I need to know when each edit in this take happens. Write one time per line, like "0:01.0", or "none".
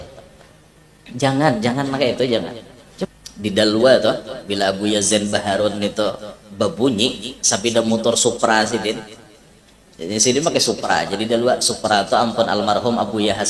0:03.1